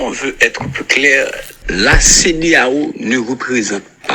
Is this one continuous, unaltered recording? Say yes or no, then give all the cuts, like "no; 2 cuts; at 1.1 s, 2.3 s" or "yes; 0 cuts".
yes; 0 cuts